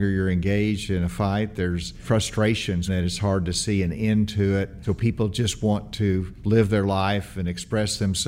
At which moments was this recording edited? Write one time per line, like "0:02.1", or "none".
0:02.0
0:02.9
0:04.8
0:06.3